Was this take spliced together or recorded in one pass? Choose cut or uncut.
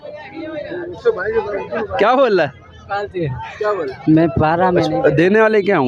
cut